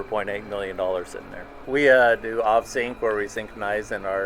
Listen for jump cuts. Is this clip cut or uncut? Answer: cut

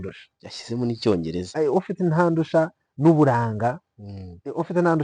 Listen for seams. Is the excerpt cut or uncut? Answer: cut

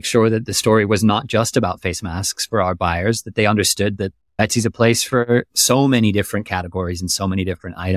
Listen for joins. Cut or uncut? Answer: cut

